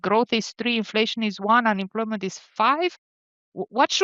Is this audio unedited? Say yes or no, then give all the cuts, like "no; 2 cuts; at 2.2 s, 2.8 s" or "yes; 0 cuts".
no; 1 cut; at 2.4 s